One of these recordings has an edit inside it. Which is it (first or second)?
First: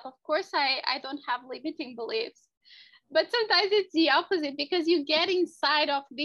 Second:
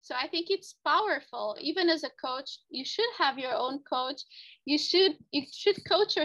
second